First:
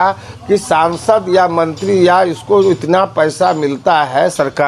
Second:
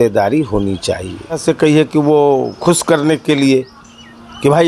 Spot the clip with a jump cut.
second; 1 cut; at 1.4 s

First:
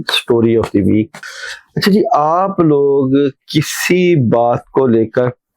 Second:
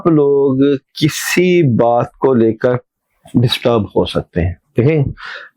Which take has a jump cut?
first; 1 cut; at 1.2 s

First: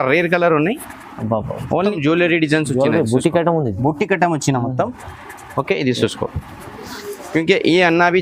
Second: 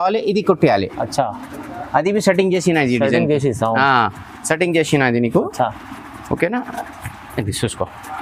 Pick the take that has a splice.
first; 1 cut; at 1.9 s

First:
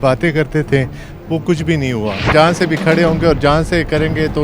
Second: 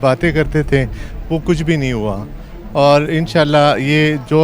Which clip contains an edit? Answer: first; 1 cut; at 2.3 s

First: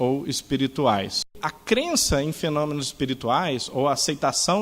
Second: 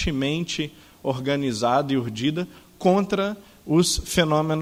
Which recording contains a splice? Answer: first; 1 cut; at 1.5 s

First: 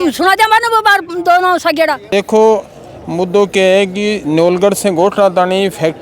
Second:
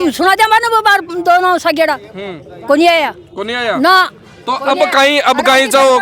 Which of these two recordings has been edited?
first; 1 cut; at 2.0 s

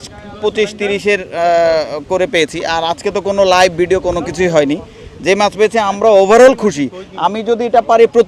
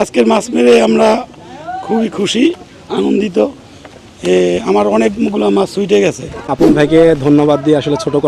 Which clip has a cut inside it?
second; 1 cut; at 6.4 s

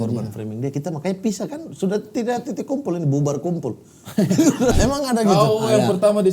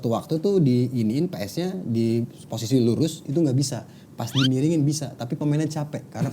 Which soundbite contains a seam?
first; 1 cut; at 4.8 s

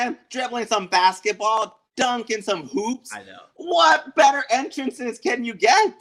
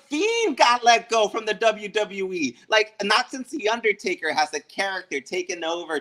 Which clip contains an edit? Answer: second; 1 cut; at 2.6 s

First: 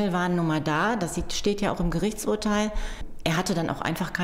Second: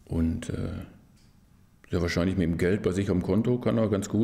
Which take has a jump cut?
first; 1 cut; at 3.1 s

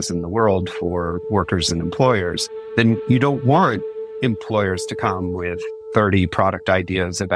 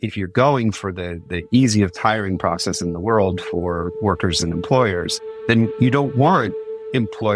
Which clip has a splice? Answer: first; 1 cut; at 5.7 s

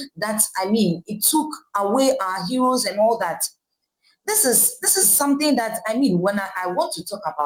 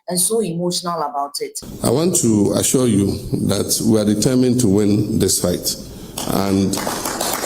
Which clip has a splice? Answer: second; 1 cut; at 1.1 s

